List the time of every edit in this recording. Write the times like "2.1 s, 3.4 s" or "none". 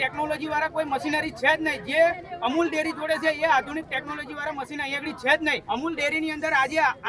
5.6 s